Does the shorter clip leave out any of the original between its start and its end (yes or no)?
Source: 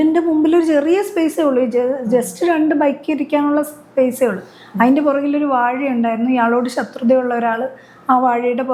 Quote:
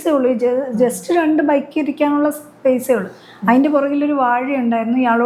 no